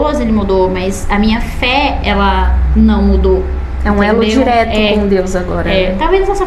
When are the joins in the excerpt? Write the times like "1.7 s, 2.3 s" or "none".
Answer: none